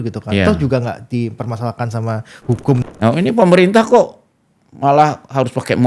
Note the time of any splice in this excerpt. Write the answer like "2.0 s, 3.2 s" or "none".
2.9 s